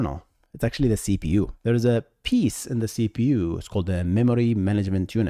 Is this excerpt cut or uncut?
cut